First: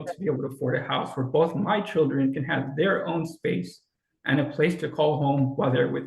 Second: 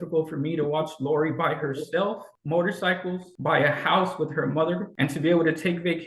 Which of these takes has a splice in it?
second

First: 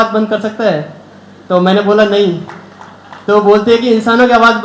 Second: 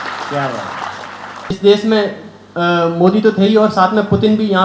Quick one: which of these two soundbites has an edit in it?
second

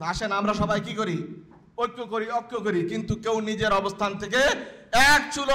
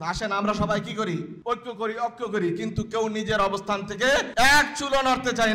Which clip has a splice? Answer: second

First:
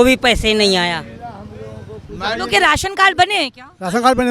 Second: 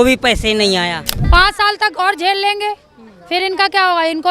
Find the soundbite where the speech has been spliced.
second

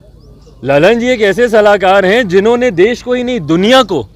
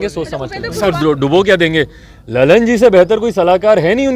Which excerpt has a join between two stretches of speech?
second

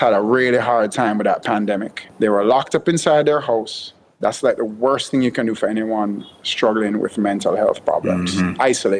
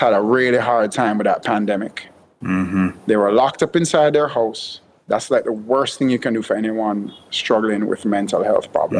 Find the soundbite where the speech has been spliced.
first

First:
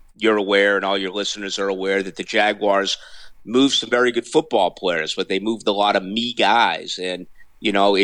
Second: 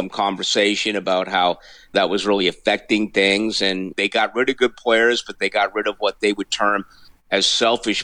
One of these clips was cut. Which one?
second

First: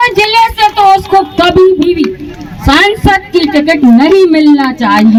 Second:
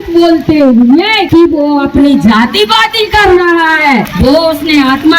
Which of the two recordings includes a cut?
second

